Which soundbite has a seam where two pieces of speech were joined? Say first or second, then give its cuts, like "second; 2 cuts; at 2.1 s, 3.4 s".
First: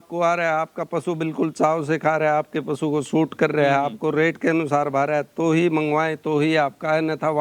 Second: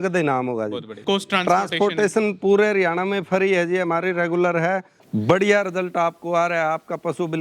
second; 2 cuts; at 0.9 s, 5.0 s